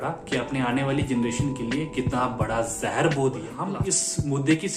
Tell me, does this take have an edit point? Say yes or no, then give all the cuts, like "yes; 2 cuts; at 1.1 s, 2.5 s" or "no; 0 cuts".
yes; 1 cut; at 3.6 s